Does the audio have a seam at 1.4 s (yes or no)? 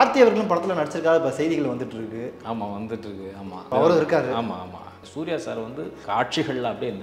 no